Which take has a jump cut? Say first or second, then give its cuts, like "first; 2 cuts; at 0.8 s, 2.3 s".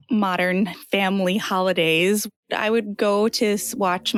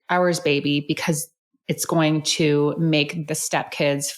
second; 1 cut; at 3.2 s